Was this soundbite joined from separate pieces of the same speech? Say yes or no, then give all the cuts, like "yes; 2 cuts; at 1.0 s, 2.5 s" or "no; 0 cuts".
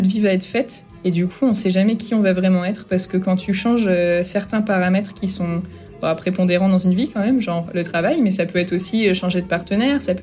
no; 0 cuts